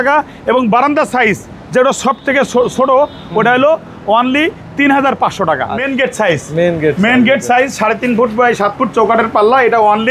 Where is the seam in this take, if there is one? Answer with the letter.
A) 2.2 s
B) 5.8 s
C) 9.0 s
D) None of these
B